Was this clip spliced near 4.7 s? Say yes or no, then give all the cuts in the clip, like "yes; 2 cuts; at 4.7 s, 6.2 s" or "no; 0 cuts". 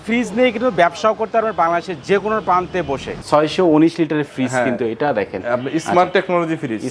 no; 1 cut; at 3.2 s